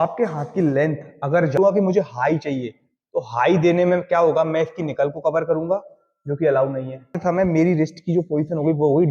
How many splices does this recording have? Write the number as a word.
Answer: two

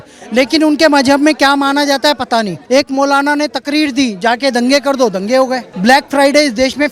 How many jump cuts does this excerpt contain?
two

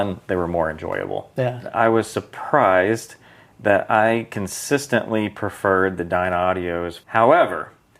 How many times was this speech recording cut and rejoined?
two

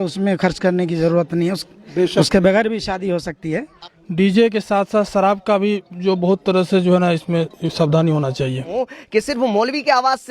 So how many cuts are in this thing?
two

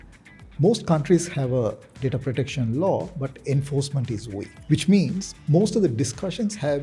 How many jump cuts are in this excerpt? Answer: one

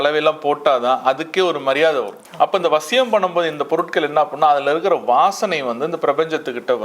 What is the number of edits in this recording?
one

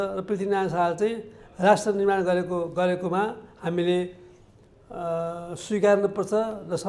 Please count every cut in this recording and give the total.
zero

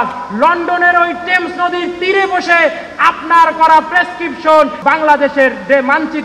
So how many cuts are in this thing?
one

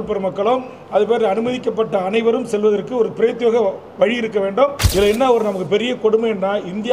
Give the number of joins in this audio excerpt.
one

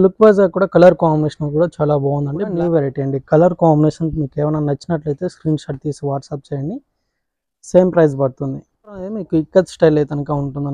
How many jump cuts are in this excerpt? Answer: two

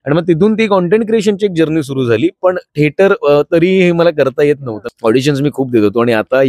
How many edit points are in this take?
one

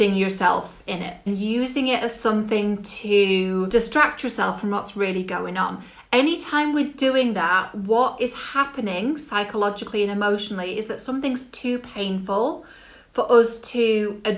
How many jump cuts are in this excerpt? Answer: two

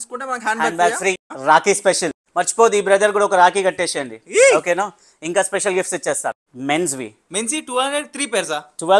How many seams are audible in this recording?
three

